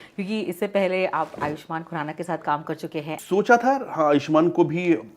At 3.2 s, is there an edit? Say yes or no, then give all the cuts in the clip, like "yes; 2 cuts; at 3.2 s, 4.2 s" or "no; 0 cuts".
yes; 1 cut; at 3.2 s